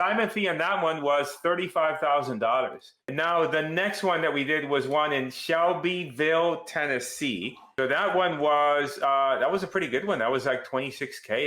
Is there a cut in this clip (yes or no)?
yes